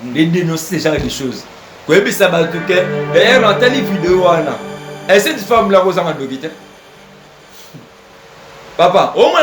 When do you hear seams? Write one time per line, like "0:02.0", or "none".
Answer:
none